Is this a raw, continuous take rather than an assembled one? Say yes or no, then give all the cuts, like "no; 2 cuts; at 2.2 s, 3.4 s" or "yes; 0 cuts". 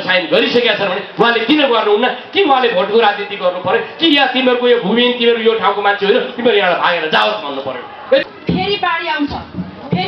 no; 1 cut; at 8.2 s